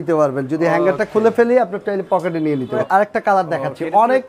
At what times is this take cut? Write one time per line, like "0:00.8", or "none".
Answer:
0:02.8